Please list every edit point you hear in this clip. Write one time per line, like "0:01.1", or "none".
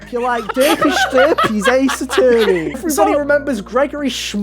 0:02.8